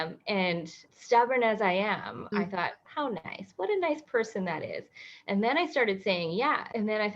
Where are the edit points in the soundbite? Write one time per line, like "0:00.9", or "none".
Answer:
0:02.5